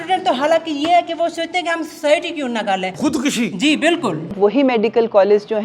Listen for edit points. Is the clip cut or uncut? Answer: cut